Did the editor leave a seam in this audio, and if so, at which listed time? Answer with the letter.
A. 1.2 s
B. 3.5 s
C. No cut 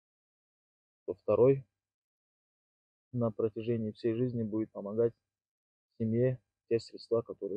C